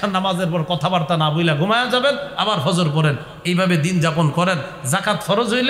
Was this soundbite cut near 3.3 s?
no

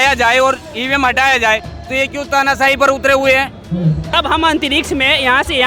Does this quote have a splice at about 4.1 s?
yes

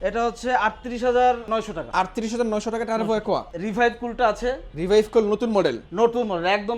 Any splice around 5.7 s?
no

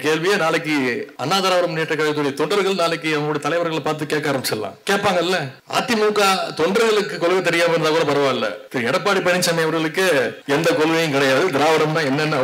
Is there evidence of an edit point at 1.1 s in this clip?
yes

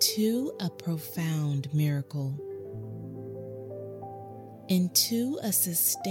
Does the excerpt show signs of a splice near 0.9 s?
no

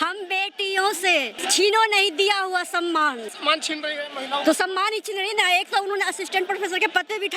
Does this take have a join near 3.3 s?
yes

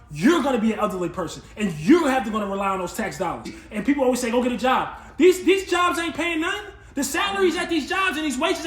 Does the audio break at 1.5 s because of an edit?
no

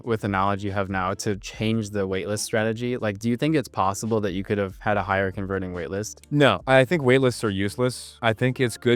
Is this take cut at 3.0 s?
no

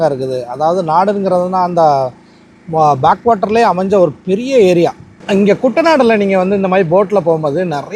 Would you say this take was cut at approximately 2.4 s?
no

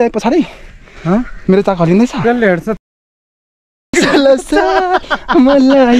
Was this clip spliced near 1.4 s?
no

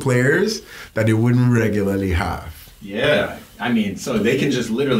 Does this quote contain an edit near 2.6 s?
no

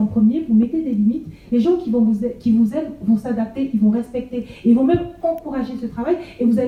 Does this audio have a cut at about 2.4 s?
no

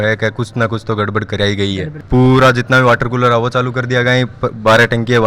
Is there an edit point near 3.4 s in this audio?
no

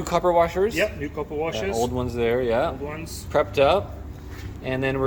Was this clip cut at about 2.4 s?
no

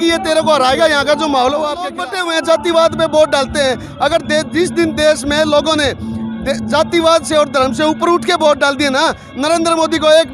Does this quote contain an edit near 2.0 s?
yes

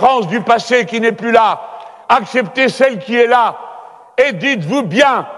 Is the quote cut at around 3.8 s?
no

